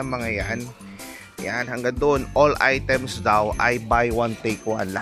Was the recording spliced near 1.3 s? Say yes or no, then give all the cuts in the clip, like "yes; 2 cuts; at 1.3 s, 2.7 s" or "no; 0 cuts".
no; 0 cuts